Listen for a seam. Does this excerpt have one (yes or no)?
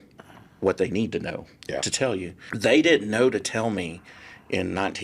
yes